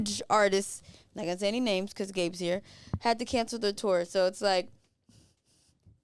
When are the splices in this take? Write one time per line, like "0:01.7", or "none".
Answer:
none